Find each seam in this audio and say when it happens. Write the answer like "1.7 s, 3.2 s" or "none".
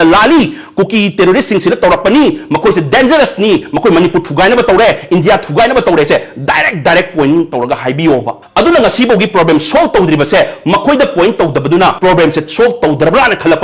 8.4 s, 12.0 s